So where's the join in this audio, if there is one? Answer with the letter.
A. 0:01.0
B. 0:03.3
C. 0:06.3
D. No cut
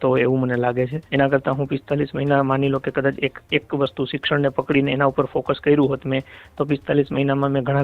A